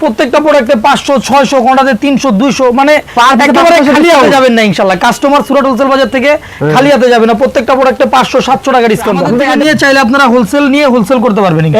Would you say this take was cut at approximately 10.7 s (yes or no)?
no